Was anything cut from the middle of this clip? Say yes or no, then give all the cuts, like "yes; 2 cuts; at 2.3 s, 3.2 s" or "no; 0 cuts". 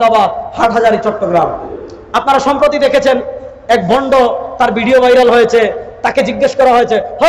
yes; 1 cut; at 1.7 s